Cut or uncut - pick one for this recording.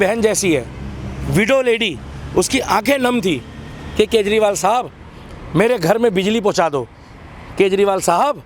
uncut